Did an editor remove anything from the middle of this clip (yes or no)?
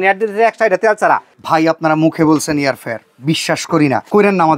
yes